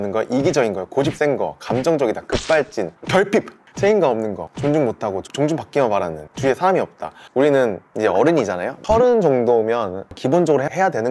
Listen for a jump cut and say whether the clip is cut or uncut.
cut